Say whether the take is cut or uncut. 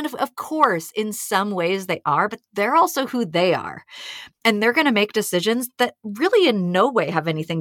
uncut